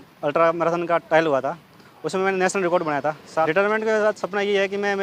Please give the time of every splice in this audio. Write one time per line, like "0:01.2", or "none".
0:03.5

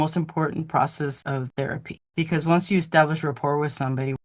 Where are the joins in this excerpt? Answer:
none

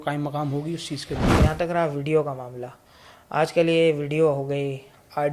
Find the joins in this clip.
0:01.3

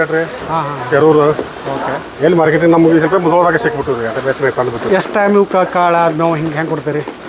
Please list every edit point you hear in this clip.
0:04.9

